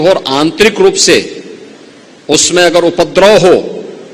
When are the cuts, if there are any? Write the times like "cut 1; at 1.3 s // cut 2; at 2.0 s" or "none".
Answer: none